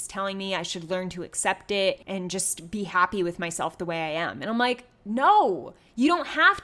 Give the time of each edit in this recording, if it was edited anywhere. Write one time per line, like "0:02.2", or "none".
0:02.0